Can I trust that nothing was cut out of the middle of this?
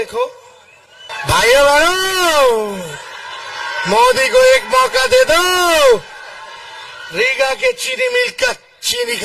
no; 1 cut; at 1.1 s

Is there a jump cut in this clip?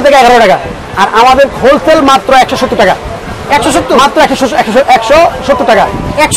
no; 0 cuts

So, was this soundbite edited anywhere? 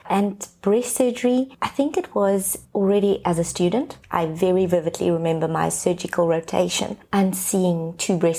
yes; 2 cuts; at 1.6 s, 2.6 s

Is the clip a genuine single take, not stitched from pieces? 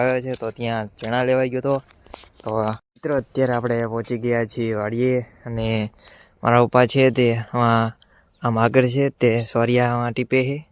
no; 1 cut; at 2.8 s

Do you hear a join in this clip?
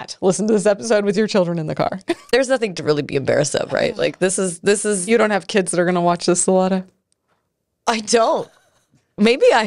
yes; 1 cut; at 2.3 s

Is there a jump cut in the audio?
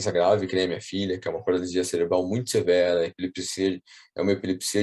no; 0 cuts

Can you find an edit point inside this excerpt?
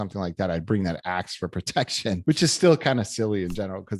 yes; 1 cut; at 2.2 s

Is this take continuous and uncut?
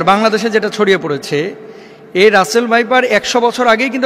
yes; 0 cuts

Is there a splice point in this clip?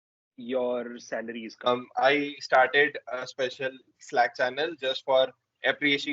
yes; 1 cut; at 1.7 s

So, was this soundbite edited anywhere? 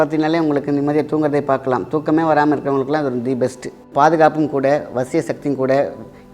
yes; 1 cut; at 3.9 s

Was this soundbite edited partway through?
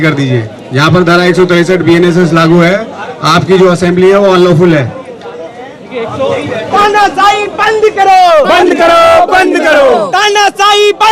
no; 0 cuts

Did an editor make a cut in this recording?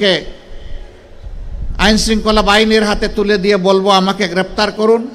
no; 0 cuts

